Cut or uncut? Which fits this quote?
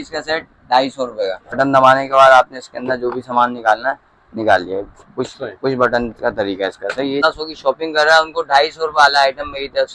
cut